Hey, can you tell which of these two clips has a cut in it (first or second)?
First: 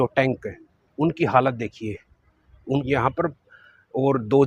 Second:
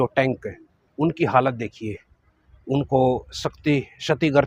first